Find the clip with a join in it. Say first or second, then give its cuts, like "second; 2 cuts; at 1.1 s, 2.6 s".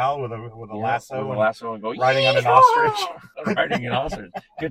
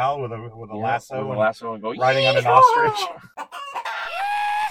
first; 1 cut; at 3.3 s